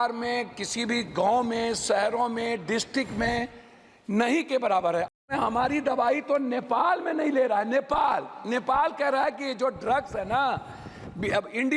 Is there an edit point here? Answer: yes; 1 cut; at 5.2 s

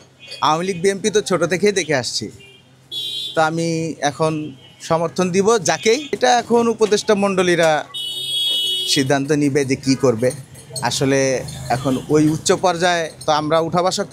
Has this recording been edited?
no; 0 cuts

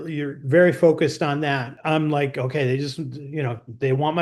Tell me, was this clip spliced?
yes; 1 cut; at 1.7 s

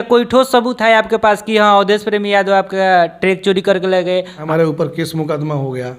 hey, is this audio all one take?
no; 1 cut; at 4.4 s

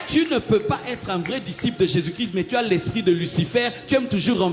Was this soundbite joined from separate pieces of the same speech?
no; 0 cuts

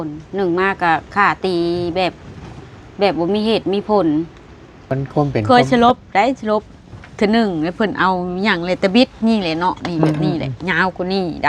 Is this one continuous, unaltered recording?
no; 1 cut; at 5.0 s

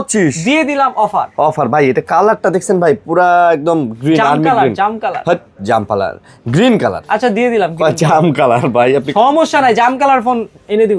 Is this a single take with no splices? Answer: yes; 0 cuts

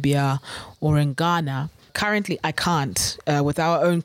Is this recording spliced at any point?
yes; 1 cut; at 1.9 s

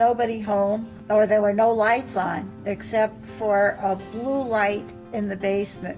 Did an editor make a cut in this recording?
yes; 1 cut; at 1.0 s

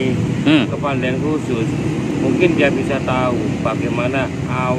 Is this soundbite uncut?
yes; 0 cuts

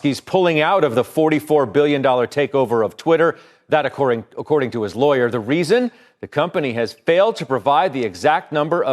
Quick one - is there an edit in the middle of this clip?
no; 0 cuts

